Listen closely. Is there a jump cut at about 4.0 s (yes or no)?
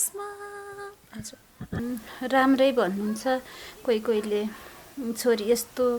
no